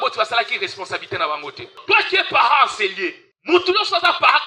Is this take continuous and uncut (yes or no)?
no